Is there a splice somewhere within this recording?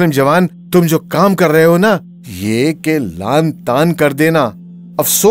no; 0 cuts

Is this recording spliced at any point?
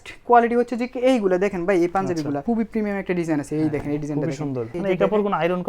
yes; 2 cuts; at 2.4 s, 4.7 s

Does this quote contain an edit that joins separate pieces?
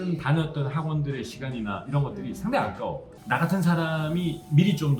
no; 0 cuts

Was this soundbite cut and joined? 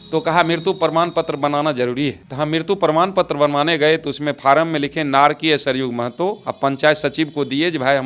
no; 0 cuts

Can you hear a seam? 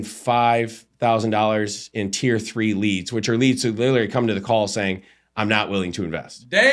no; 0 cuts

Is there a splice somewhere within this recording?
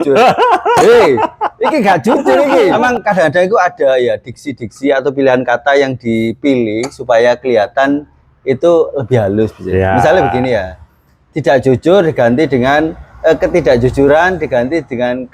yes; 1 cut; at 2.7 s

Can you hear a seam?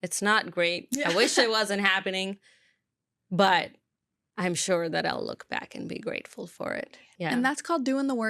yes; 1 cut; at 7.1 s

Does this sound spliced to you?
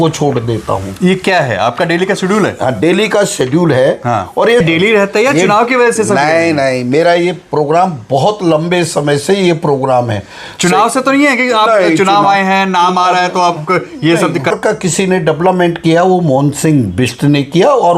yes; 2 cuts; at 4.6 s, 14.5 s

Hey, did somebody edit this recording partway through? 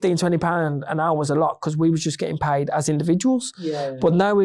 no; 0 cuts

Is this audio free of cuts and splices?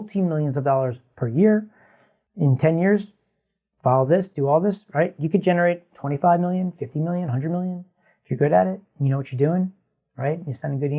yes; 0 cuts

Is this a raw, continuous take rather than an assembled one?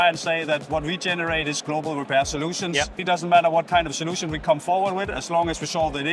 no; 1 cut; at 3.0 s

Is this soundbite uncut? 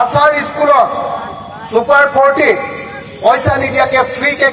yes; 0 cuts

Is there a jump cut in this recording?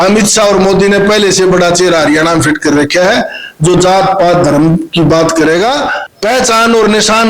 yes; 1 cut; at 6.0 s

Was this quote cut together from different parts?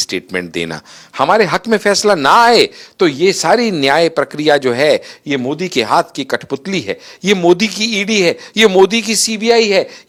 no; 0 cuts

